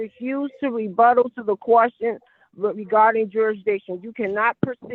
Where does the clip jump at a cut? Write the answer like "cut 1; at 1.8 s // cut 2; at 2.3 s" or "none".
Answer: none